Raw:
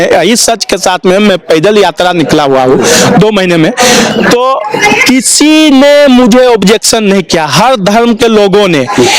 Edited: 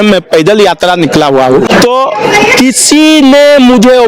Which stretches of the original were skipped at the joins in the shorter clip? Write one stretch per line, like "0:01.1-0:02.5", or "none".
0:02.8-0:04.2